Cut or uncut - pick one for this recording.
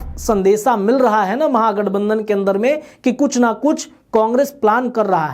uncut